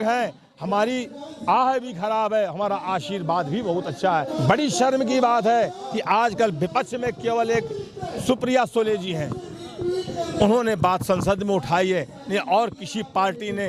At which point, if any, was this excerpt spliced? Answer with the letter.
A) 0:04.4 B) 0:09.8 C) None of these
A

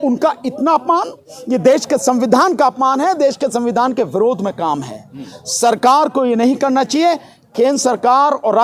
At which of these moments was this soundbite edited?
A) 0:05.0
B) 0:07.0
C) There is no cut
C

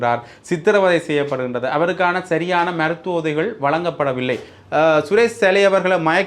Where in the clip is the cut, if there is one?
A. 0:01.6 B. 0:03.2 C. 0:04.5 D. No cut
C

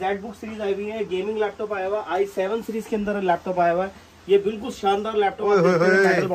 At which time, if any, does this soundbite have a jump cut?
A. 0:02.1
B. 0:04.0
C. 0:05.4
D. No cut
D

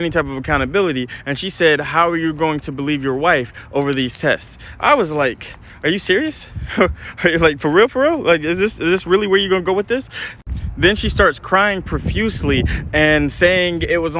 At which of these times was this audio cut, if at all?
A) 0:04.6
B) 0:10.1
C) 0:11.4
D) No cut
A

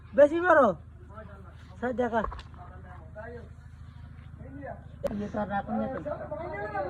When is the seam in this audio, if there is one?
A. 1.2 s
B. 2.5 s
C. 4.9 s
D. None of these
C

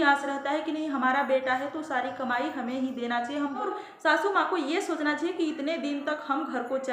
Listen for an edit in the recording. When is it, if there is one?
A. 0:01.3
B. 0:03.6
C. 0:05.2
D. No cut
B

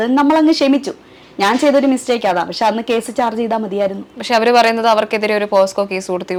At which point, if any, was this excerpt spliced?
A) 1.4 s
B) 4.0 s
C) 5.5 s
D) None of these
D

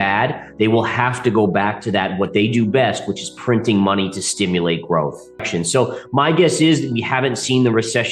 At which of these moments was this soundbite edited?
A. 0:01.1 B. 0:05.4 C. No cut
B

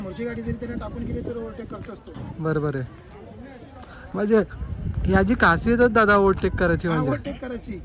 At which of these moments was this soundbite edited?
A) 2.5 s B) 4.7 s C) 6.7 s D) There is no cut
D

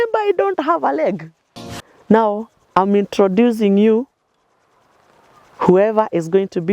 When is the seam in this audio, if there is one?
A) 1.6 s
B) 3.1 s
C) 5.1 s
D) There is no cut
A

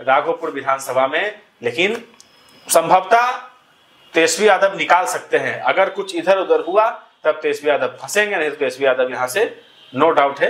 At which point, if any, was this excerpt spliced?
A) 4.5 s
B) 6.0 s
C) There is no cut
C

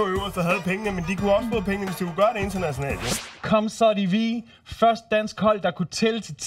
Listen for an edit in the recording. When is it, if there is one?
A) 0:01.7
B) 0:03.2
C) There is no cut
B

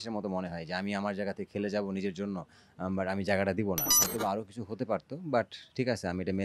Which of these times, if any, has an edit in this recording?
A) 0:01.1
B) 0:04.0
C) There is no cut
B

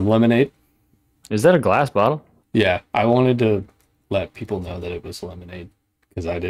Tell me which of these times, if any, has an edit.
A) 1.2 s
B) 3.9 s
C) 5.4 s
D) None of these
A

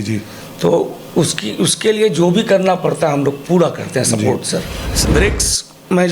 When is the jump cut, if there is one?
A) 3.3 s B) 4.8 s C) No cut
B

